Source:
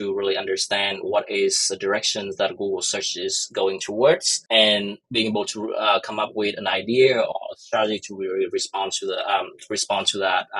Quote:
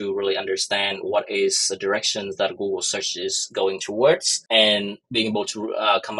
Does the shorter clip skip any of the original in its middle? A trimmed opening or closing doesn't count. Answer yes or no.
no